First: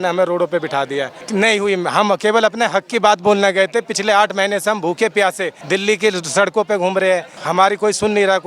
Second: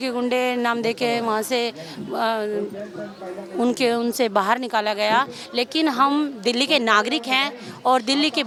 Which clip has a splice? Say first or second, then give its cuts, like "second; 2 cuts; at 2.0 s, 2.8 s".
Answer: first; 3 cuts; at 1.2 s, 5.5 s, 7.4 s